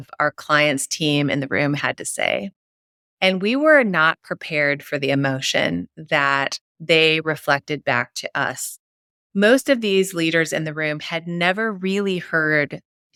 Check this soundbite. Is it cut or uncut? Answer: uncut